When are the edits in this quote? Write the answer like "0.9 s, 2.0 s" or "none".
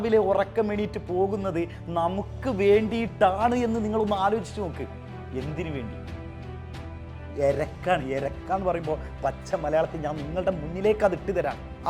7.2 s